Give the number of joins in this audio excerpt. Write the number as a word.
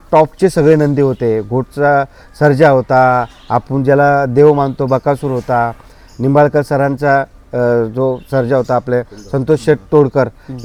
zero